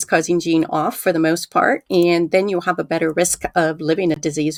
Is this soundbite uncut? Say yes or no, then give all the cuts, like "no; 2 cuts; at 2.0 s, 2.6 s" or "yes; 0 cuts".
yes; 0 cuts